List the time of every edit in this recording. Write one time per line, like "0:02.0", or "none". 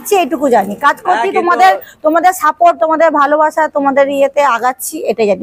none